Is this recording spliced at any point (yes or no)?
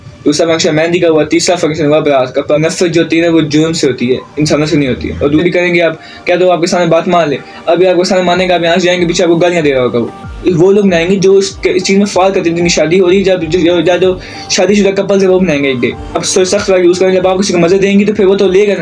yes